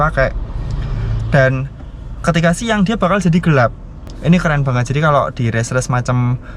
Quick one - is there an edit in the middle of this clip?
no; 0 cuts

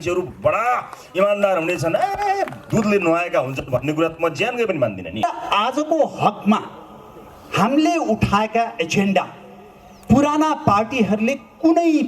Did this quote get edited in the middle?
yes; 1 cut; at 5.2 s

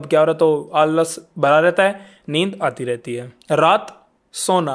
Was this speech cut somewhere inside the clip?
yes; 1 cut; at 3.3 s

